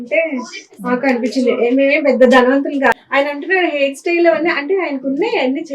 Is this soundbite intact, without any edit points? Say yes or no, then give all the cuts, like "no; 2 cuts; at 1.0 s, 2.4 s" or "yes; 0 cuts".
no; 1 cut; at 3.0 s